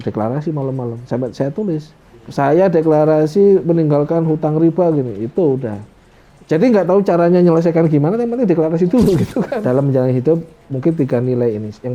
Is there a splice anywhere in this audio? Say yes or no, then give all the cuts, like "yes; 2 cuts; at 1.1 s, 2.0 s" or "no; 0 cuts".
yes; 1 cut; at 9.5 s